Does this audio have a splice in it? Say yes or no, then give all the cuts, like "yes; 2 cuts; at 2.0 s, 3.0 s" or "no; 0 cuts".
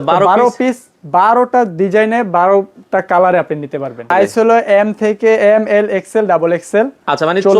yes; 1 cut; at 4.1 s